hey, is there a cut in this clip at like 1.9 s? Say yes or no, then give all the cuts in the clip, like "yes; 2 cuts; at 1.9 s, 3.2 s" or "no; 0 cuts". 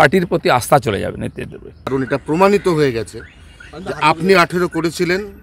yes; 1 cut; at 1.9 s